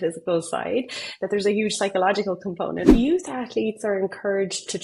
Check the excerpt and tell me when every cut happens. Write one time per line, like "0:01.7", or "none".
0:02.9

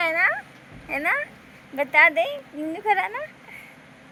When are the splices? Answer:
none

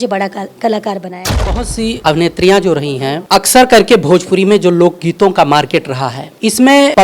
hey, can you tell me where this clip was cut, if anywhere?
0:01.5

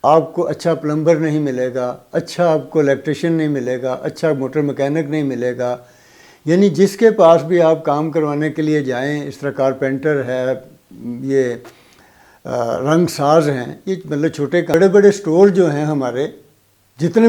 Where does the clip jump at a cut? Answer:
0:14.7

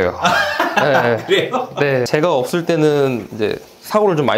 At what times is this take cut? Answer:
0:02.1

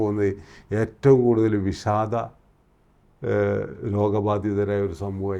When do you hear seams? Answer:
none

